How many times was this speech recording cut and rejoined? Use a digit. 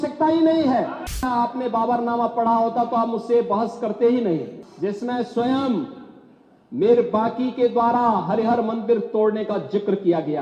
2